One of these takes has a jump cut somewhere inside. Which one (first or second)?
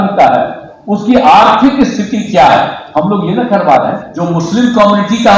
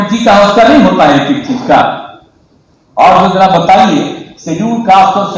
first